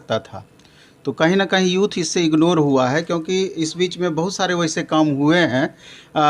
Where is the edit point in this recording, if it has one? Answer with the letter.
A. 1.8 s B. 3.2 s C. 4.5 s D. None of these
D